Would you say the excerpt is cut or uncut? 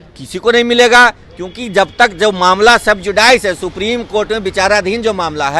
uncut